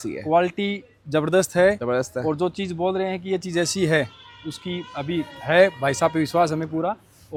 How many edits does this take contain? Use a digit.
0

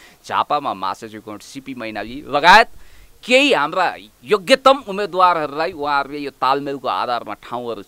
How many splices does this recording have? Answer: 0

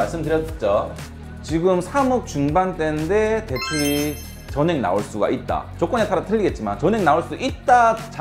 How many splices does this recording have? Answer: 1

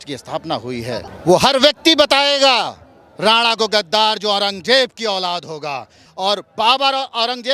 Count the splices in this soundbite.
2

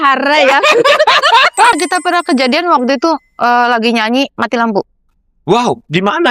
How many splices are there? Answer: 1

